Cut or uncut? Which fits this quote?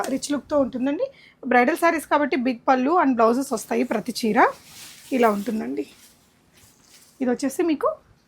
uncut